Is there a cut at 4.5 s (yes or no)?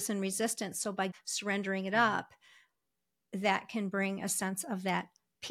no